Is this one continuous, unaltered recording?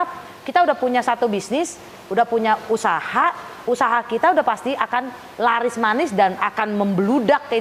yes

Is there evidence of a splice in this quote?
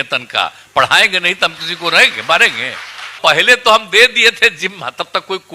yes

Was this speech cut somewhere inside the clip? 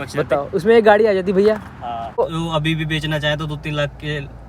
yes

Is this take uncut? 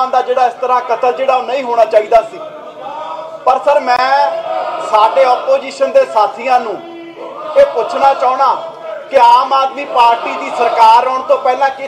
yes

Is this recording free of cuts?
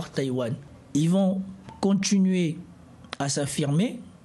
yes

